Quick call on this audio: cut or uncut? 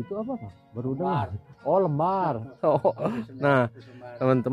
uncut